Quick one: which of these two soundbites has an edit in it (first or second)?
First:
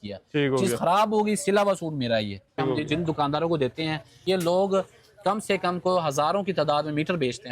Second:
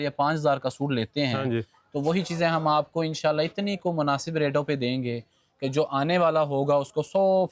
first